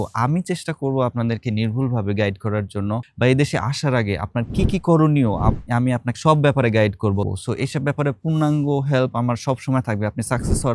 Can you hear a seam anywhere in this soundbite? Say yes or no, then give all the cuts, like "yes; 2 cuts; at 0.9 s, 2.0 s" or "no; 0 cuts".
yes; 2 cuts; at 3.1 s, 7.2 s